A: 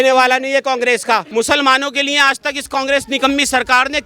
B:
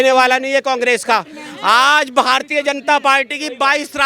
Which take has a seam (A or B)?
A